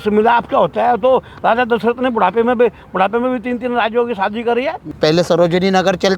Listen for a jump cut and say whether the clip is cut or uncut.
cut